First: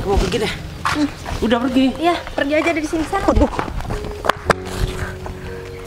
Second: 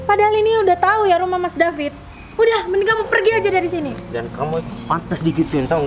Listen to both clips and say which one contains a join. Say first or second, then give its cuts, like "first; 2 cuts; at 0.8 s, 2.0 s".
first; 1 cut; at 3.8 s